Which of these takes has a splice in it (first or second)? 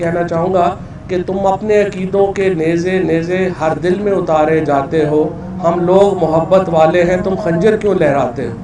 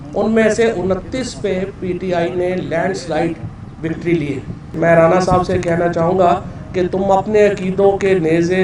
second